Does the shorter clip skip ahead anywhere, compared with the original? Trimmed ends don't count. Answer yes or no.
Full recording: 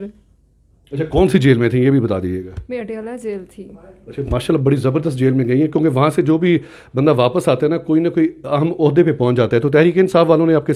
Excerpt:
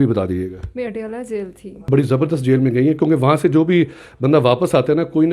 yes